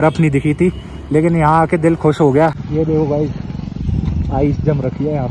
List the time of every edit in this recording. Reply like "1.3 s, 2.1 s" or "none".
2.6 s

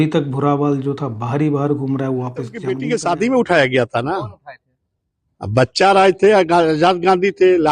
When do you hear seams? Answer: 2.7 s

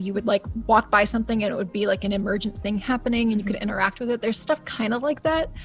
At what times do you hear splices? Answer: 3.6 s

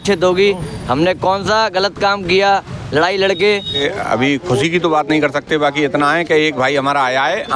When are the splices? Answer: 3.8 s

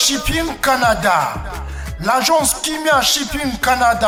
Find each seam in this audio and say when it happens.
none

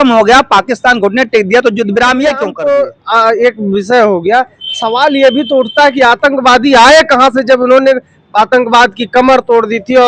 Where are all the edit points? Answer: 2.5 s

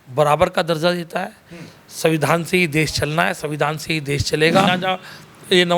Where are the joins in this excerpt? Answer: 4.7 s

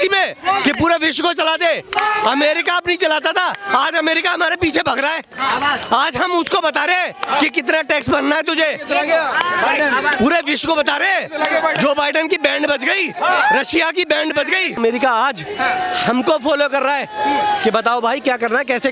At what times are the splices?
14.8 s

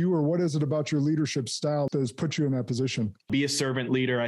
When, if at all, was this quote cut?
1.9 s, 3.3 s

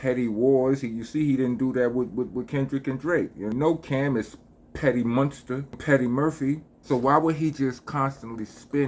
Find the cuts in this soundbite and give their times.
3.5 s, 5.8 s, 6.7 s

